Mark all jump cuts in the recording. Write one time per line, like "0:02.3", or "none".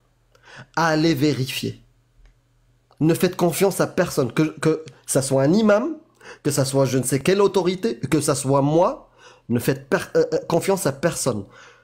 none